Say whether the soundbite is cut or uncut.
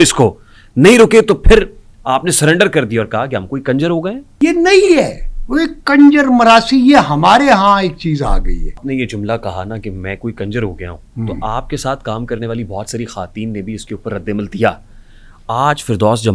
cut